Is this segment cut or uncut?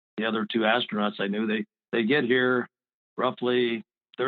uncut